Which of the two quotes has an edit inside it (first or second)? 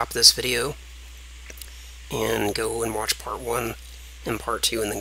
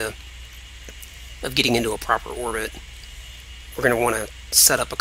first